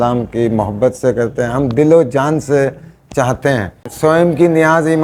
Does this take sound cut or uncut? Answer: cut